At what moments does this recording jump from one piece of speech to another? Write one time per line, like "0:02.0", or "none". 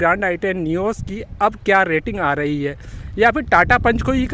none